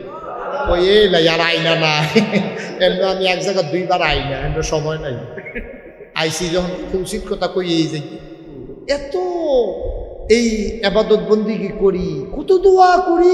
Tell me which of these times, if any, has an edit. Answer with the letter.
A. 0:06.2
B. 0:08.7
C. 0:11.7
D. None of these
B